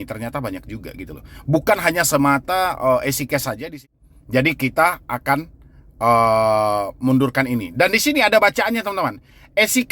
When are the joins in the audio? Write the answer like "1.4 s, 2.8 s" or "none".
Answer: 3.8 s